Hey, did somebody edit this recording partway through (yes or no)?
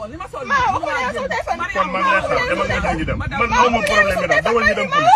no